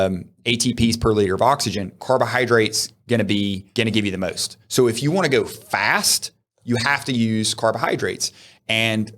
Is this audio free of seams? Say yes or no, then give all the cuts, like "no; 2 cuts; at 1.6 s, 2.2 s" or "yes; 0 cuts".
no; 1 cut; at 3.6 s